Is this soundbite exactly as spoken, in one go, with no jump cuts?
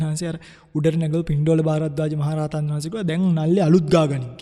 yes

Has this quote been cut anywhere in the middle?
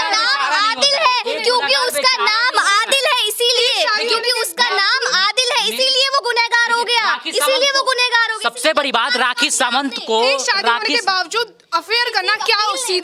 no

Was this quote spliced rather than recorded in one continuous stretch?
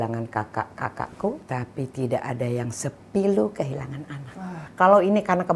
yes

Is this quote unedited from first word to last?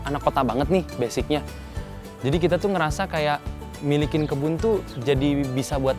yes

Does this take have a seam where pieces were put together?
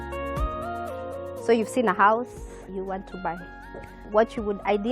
yes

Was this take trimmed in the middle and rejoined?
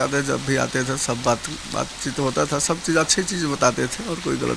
no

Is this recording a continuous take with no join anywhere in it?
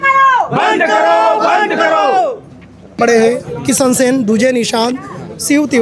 no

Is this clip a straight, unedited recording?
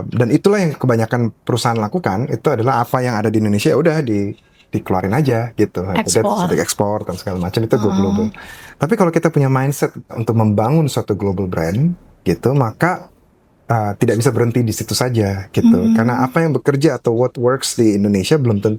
yes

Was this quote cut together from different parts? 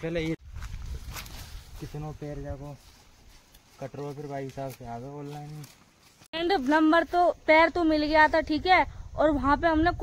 no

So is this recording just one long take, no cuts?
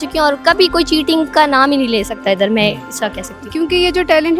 no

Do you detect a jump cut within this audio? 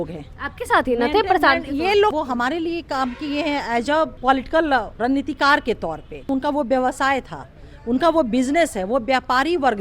yes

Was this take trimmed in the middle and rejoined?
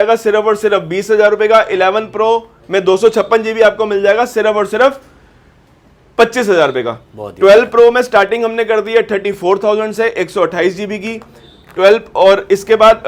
no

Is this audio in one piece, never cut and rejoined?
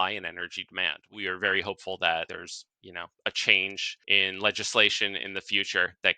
no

